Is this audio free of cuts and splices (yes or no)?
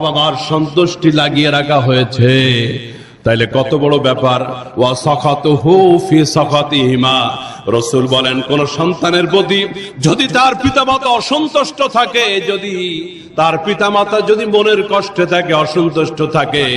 yes